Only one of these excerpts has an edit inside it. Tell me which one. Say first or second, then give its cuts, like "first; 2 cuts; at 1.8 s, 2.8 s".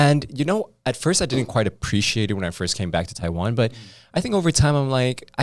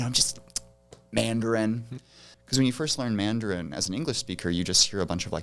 second; 1 cut; at 2.3 s